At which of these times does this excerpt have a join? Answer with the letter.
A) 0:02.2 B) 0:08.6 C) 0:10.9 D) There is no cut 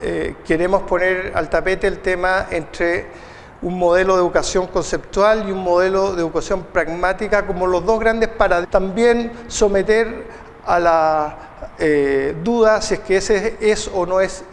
D